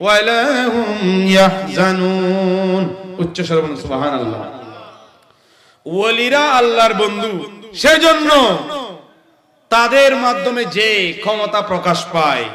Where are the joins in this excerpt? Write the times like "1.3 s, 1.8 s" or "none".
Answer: none